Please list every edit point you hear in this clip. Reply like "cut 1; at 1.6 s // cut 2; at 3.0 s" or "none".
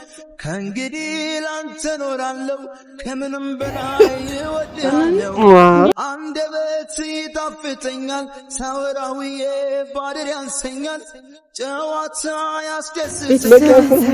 none